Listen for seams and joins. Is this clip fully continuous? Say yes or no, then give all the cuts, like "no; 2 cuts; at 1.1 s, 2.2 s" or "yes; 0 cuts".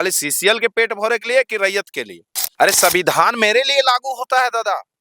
no; 1 cut; at 2.4 s